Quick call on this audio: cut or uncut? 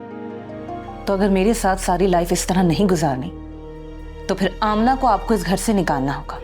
cut